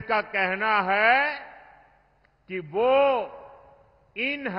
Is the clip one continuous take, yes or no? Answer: yes